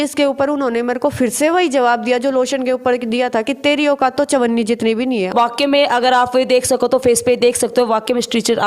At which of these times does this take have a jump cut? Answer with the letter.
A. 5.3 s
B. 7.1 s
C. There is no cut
A